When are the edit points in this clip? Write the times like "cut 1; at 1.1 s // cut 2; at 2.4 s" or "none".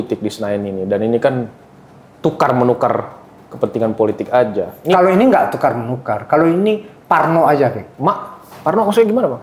none